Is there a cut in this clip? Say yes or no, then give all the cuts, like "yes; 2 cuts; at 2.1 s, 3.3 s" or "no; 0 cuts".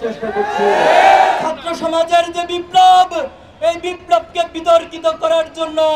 yes; 1 cut; at 1.4 s